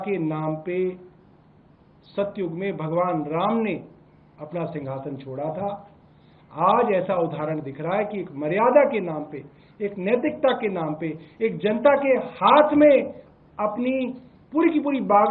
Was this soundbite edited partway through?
no; 0 cuts

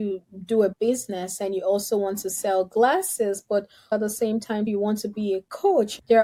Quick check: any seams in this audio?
no; 0 cuts

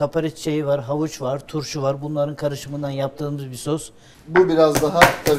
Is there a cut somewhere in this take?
yes; 1 cut; at 4.2 s

